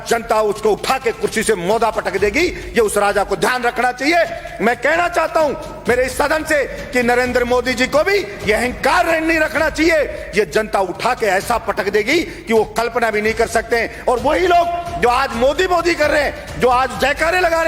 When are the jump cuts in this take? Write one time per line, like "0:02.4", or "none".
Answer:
none